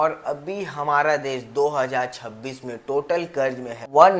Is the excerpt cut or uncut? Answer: uncut